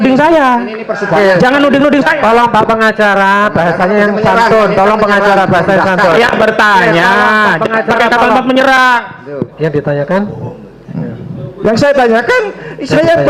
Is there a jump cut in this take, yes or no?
yes